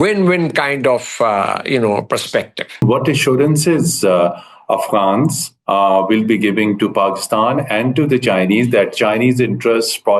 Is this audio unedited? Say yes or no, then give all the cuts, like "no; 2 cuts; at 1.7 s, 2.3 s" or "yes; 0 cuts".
no; 1 cut; at 2.8 s